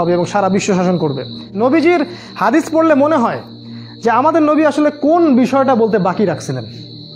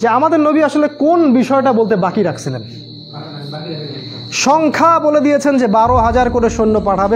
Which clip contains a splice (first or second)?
first